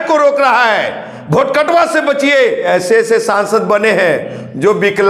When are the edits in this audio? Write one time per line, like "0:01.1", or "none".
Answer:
0:02.7